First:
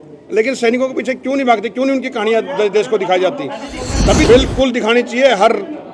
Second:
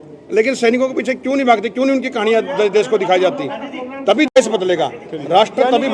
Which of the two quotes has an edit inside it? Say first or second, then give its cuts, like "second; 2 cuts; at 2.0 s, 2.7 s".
first; 1 cut; at 4.3 s